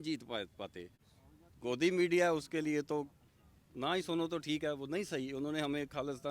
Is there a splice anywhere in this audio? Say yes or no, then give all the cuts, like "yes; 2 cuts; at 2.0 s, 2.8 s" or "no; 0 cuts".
yes; 1 cut; at 1.0 s